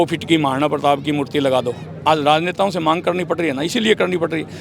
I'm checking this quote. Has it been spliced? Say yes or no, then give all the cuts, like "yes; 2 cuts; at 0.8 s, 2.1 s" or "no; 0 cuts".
no; 0 cuts